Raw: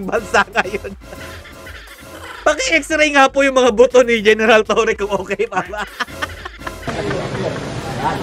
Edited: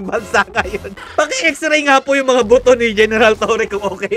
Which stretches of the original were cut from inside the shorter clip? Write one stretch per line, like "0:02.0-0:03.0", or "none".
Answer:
0:01.0-0:02.2